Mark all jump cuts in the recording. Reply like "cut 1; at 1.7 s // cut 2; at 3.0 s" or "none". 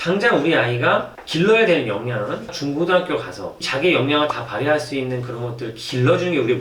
cut 1; at 2.5 s